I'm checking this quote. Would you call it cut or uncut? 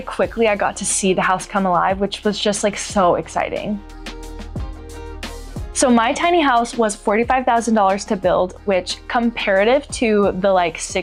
uncut